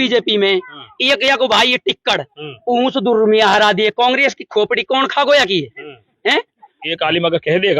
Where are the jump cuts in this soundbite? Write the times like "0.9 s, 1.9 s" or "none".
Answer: 6.9 s